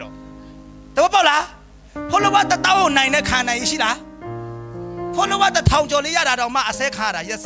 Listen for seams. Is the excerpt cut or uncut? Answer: uncut